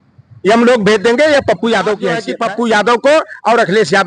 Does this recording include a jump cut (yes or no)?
yes